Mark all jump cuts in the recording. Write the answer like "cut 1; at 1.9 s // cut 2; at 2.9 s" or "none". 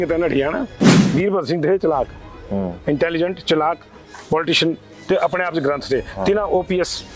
cut 1; at 1.0 s